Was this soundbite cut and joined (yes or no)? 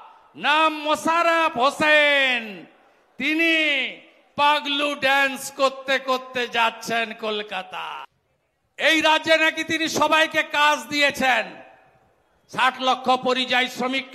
yes